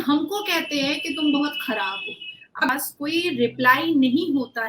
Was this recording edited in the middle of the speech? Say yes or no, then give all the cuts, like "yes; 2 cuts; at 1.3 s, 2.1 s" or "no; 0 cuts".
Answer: yes; 1 cut; at 2.7 s